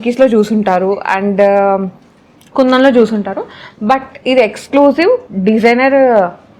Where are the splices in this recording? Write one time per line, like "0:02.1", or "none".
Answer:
none